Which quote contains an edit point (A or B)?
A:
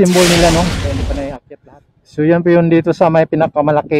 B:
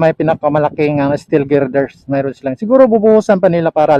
A